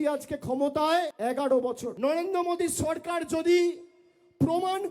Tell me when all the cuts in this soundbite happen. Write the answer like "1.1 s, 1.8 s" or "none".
1.1 s, 1.9 s